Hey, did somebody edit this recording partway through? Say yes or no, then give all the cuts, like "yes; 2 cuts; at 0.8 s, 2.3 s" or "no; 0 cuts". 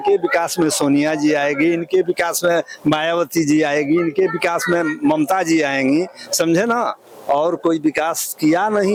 no; 0 cuts